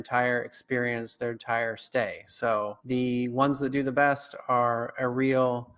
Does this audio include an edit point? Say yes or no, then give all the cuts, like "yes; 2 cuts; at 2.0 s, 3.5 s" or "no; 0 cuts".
yes; 1 cut; at 2.8 s